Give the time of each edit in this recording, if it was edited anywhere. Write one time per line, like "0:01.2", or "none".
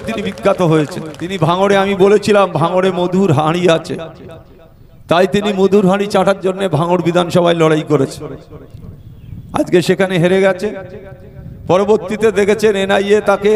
0:01.3